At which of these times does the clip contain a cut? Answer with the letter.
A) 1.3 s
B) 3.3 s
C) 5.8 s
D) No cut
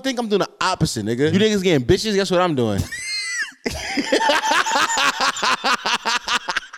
A